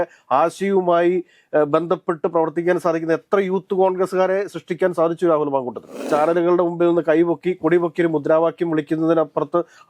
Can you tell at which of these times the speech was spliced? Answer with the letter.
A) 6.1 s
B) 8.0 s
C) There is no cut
A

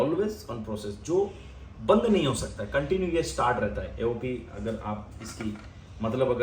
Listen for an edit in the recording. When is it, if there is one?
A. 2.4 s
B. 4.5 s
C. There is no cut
C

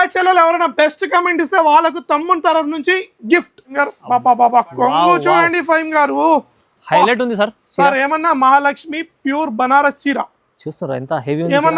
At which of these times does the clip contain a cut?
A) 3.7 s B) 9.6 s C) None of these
A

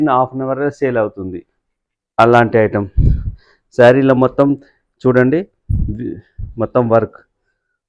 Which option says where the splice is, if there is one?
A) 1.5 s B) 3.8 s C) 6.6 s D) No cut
D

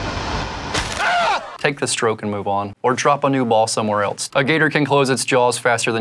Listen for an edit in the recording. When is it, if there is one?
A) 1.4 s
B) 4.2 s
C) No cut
B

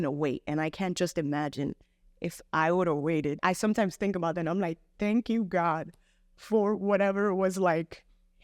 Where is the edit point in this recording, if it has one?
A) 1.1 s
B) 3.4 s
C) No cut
B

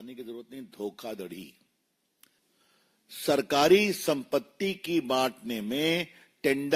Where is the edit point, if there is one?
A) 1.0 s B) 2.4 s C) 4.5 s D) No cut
B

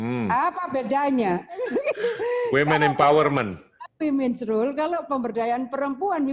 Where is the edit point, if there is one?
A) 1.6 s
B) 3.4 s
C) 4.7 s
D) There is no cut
A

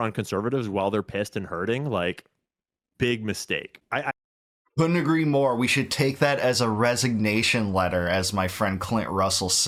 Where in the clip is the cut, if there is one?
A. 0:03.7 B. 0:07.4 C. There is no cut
C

